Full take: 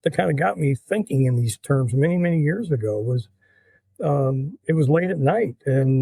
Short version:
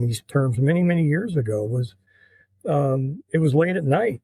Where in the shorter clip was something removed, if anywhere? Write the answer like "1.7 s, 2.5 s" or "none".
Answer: none